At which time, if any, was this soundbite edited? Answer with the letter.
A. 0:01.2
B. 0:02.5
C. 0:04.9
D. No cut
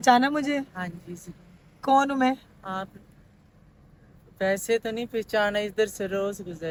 D